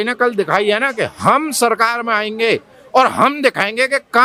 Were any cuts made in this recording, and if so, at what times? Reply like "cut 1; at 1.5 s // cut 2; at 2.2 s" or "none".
none